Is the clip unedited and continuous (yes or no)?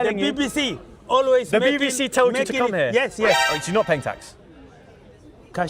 no